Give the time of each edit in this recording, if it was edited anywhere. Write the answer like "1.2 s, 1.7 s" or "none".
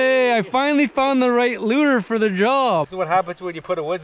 2.9 s